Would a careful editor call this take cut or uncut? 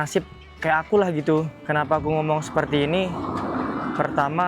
cut